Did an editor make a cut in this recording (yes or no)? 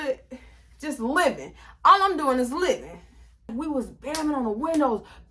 yes